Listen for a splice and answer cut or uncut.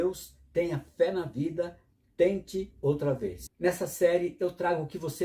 cut